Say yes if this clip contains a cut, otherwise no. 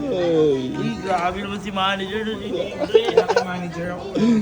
no